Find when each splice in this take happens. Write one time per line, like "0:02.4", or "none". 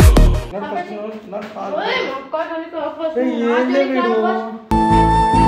none